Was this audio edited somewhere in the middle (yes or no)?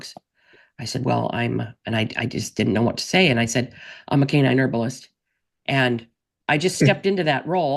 no